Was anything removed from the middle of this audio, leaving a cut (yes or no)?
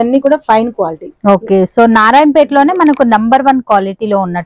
no